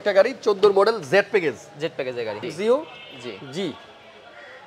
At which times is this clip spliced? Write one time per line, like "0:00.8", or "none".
0:02.5